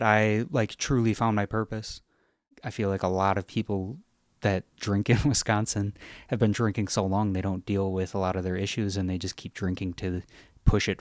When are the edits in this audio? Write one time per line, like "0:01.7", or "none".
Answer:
0:02.5

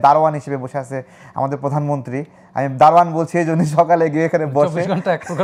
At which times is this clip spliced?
none

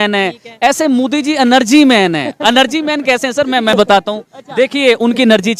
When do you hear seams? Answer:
none

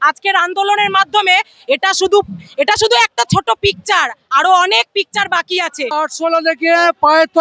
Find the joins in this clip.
0:06.0

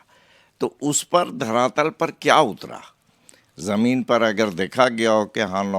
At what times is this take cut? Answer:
none

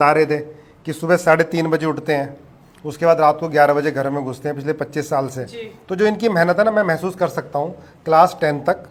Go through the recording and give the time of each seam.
none

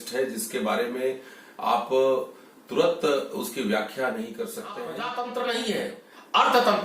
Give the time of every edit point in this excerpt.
0:04.9

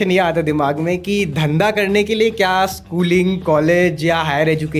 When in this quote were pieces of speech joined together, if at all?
none

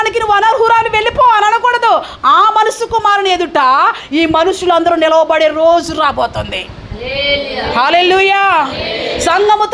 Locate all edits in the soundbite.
none

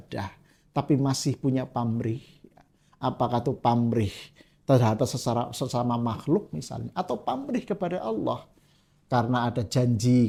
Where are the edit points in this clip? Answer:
none

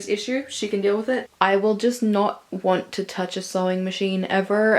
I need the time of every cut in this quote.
0:01.3

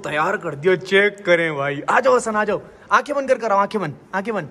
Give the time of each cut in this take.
none

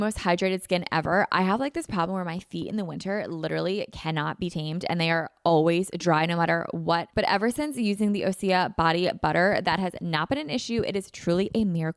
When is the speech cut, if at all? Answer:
0:07.1

